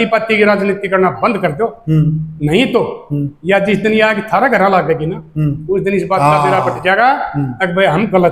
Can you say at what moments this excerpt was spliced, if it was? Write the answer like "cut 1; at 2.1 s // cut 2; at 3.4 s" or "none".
none